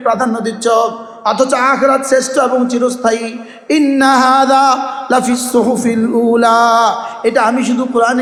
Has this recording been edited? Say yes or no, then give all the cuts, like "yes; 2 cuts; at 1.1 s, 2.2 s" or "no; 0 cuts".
no; 0 cuts